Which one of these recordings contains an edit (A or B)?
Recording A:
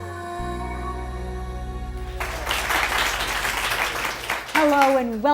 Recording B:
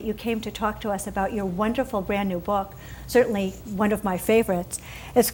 A